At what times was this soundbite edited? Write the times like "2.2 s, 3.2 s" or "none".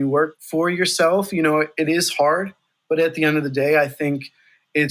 none